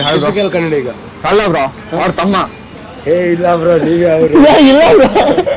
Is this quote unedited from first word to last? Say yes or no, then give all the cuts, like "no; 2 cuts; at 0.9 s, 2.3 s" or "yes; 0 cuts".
yes; 0 cuts